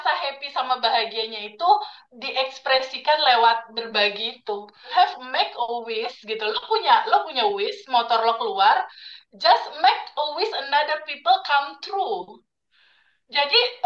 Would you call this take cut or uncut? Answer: cut